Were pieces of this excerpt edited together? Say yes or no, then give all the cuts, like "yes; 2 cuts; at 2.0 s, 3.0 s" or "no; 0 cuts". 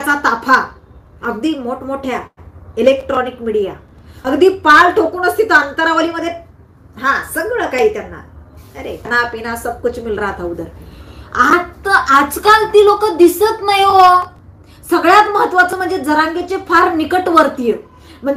no; 0 cuts